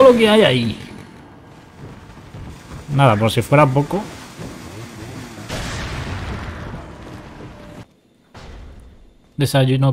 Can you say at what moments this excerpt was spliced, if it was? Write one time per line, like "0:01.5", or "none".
0:07.8